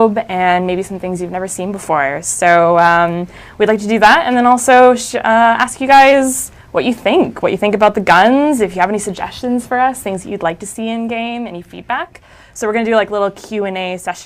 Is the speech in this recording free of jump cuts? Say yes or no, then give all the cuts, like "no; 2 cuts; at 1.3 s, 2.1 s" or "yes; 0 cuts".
no; 1 cut; at 12.4 s